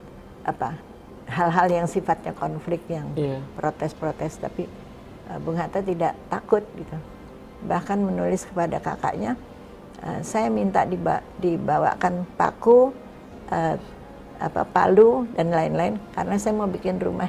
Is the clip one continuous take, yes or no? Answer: no